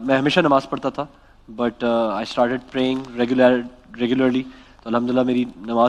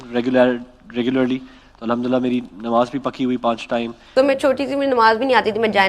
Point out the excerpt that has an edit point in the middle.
second; 1 cut; at 4.0 s

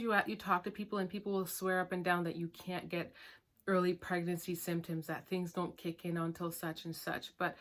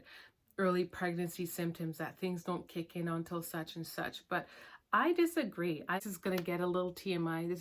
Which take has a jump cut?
second; 1 cut; at 6.0 s

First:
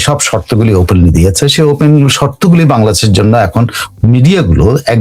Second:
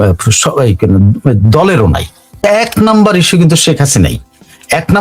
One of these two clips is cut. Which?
second; 1 cut; at 2.4 s

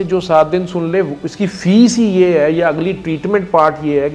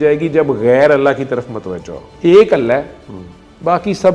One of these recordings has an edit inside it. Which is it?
second; 1 cut; at 2.0 s

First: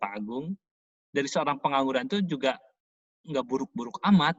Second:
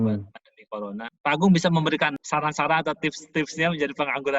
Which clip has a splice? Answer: second; 2 cuts; at 1.1 s, 2.2 s

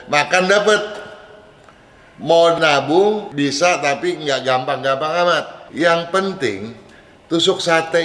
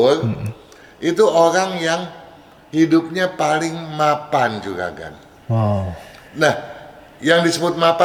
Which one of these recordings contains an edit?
first; 1 cut; at 5.6 s

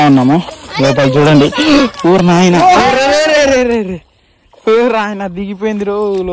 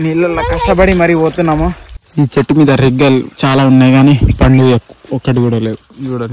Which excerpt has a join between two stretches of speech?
second; 1 cut; at 2.0 s

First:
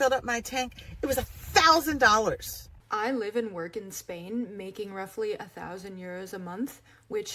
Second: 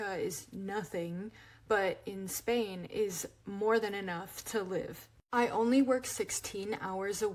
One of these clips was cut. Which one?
first; 1 cut; at 2.8 s

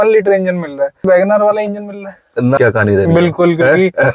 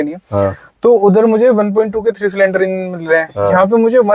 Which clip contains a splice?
first; 2 cuts; at 1.0 s, 2.6 s

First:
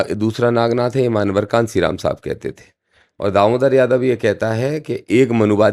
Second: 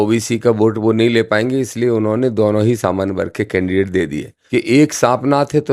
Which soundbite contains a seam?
second; 1 cut; at 4.3 s

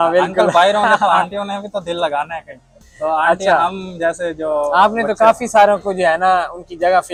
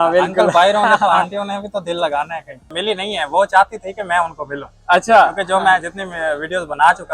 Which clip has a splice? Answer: second; 1 cut; at 2.8 s

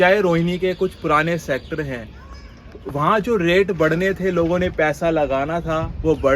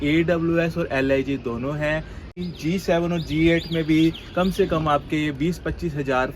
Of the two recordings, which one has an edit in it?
second; 1 cut; at 2.4 s

